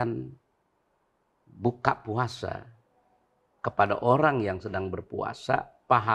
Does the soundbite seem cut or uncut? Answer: uncut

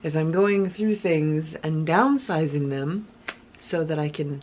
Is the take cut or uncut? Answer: uncut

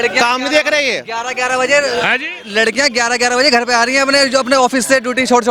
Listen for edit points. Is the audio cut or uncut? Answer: uncut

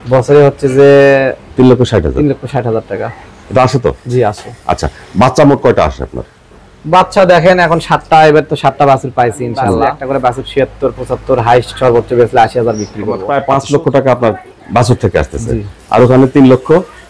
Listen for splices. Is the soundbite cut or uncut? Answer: cut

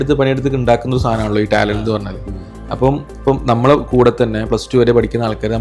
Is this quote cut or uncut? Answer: uncut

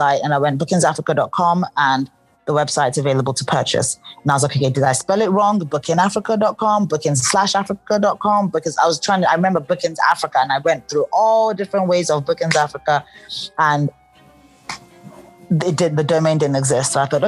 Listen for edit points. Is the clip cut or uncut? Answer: uncut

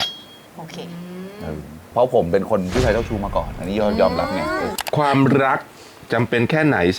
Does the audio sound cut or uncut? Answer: cut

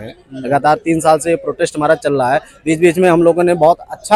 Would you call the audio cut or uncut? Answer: uncut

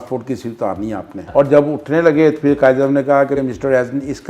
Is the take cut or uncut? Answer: cut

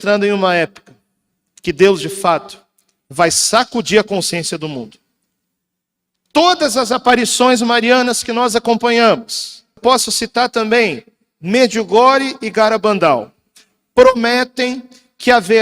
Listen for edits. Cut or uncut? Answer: cut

